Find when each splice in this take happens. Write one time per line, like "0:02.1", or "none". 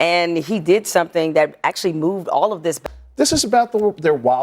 0:02.8